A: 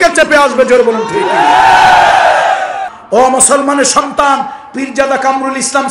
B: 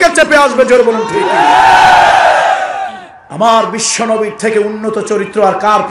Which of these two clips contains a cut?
A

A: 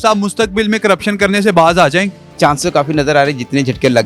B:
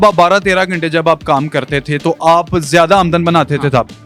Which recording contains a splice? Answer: A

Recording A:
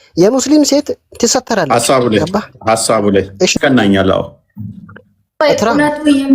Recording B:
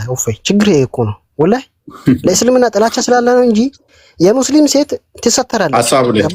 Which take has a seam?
A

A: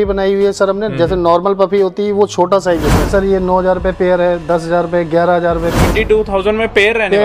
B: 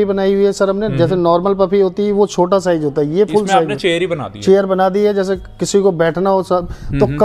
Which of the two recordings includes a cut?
A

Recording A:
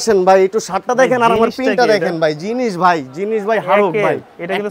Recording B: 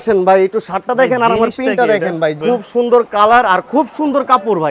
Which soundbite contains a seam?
B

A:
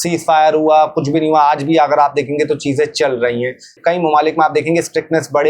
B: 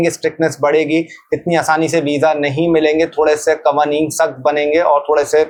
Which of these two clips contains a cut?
A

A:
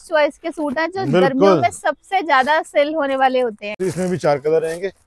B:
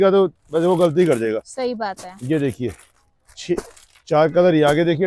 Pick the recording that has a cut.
A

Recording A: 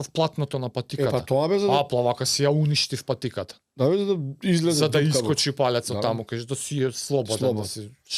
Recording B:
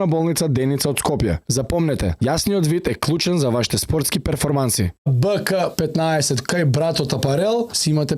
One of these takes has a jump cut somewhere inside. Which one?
B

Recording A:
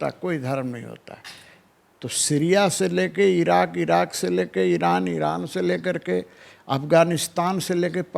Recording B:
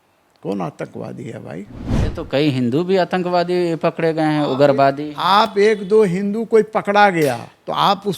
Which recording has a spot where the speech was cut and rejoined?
B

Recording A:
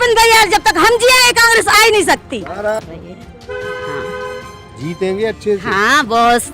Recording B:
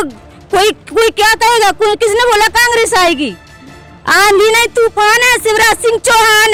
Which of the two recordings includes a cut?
A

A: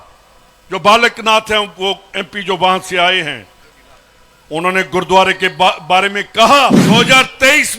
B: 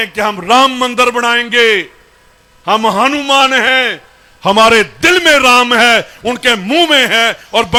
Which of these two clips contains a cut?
A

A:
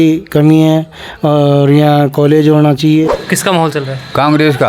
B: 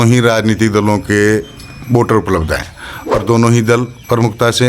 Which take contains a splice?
A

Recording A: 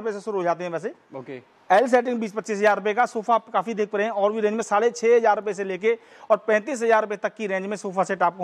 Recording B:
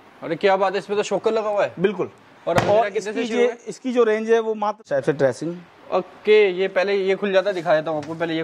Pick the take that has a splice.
B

